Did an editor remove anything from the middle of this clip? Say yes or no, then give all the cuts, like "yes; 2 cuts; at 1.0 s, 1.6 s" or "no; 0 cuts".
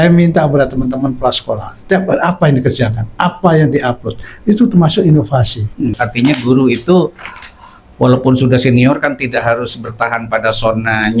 yes; 1 cut; at 5.9 s